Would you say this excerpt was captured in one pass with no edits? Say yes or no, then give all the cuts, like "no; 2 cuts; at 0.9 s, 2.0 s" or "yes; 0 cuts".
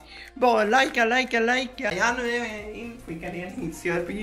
no; 1 cut; at 1.9 s